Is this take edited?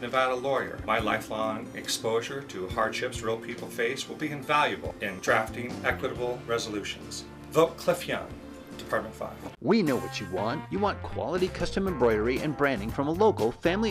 yes; 1 cut; at 9.4 s

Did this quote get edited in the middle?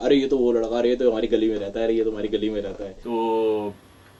no; 0 cuts

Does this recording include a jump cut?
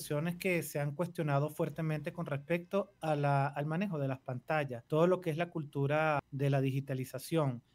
yes; 2 cuts; at 4.8 s, 6.3 s

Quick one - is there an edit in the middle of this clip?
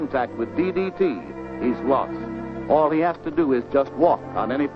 no; 0 cuts

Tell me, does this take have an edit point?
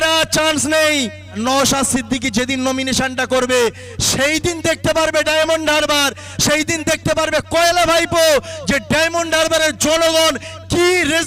yes; 1 cut; at 1.3 s

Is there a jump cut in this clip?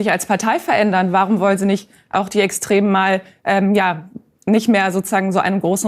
no; 0 cuts

